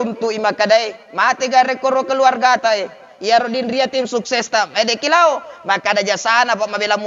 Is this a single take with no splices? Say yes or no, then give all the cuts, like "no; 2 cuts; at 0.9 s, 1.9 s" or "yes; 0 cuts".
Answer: yes; 0 cuts